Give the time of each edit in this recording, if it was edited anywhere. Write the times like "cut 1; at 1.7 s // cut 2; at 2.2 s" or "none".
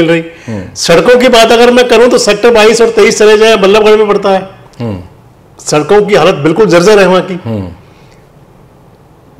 none

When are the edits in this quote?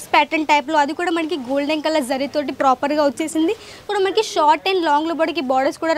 cut 1; at 3.9 s

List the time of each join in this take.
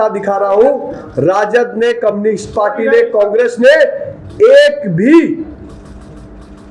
none

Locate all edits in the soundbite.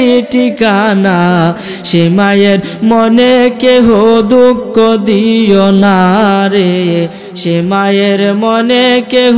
none

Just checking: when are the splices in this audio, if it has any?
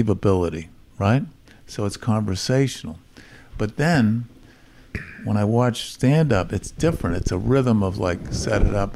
none

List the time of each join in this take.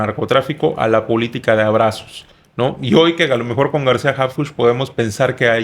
none

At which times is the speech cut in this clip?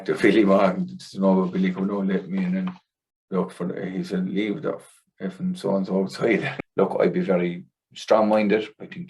cut 1; at 6.5 s

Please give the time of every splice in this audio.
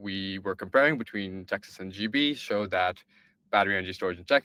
none

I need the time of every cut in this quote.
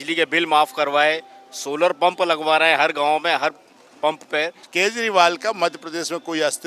cut 1; at 4.6 s

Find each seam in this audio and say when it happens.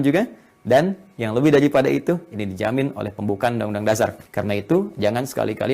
cut 1; at 4.2 s

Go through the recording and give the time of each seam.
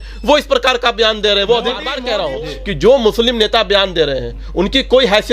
cut 1; at 1.9 s

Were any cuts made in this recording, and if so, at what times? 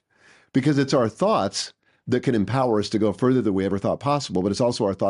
none

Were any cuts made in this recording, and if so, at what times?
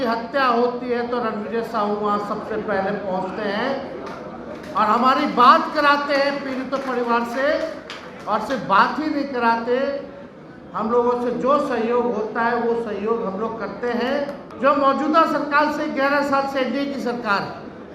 cut 1; at 14.4 s

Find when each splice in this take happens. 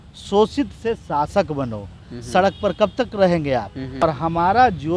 cut 1; at 4.0 s

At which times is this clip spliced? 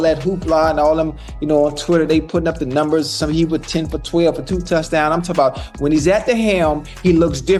none

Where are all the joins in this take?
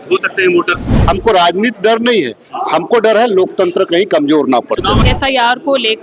cut 1; at 0.9 s // cut 2; at 5.0 s

